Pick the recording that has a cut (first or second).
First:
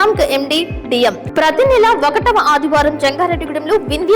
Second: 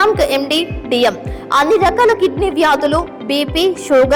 first